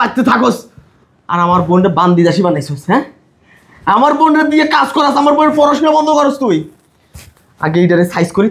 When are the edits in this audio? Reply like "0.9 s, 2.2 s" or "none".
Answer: none